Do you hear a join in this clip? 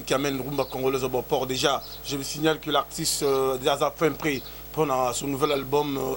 no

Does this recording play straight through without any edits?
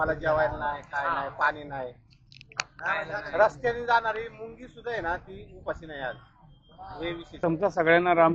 no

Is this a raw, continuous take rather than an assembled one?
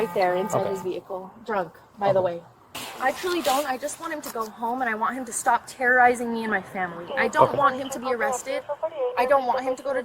yes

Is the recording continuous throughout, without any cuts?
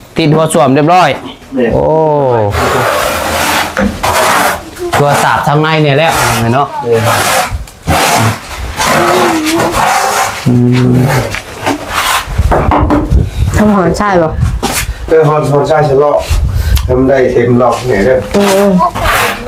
yes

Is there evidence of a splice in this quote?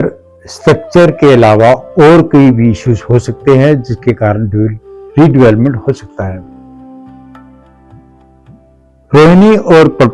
no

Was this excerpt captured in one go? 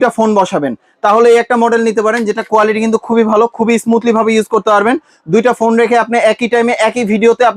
yes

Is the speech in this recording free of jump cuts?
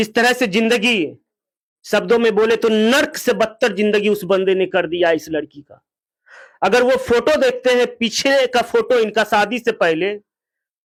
yes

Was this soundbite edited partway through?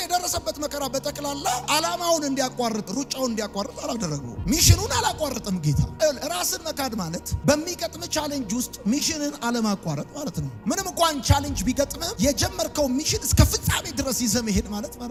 no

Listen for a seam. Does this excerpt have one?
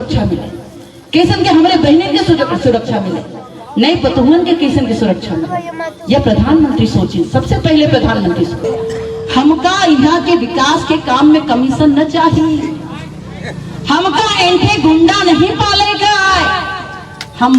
yes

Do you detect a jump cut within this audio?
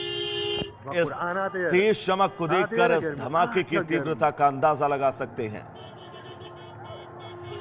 no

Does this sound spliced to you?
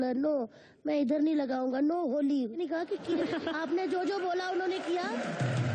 no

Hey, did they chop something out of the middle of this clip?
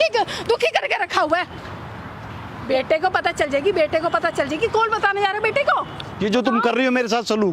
no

